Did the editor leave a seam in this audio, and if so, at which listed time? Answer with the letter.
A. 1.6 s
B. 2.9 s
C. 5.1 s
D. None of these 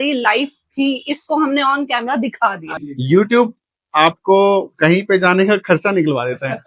B